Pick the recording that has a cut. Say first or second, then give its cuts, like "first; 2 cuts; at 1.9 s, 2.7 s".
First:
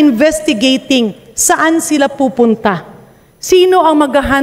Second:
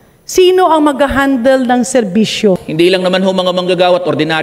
second; 1 cut; at 2.7 s